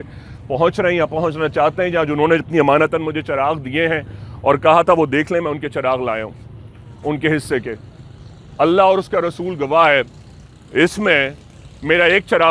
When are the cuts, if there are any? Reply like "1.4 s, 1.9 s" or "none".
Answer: none